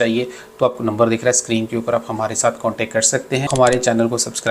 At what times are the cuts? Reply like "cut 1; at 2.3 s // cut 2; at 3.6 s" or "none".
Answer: cut 1; at 3.5 s